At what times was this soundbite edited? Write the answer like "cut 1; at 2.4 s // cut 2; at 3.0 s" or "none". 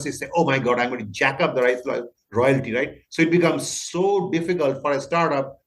none

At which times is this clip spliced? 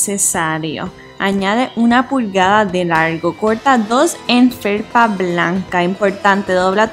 cut 1; at 1.0 s // cut 2; at 3.2 s

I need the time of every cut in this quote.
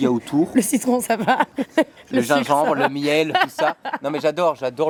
none

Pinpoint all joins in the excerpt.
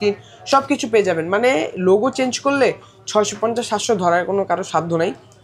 none

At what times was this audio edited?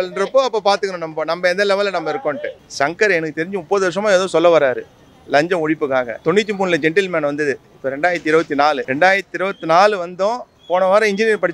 cut 1; at 2.6 s // cut 2; at 6.1 s // cut 3; at 8.9 s

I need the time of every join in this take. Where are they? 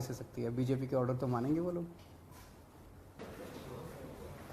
cut 1; at 3.2 s

